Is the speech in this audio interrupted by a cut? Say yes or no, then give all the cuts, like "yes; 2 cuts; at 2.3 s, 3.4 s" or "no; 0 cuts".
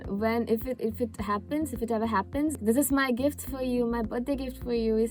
yes; 1 cut; at 2.6 s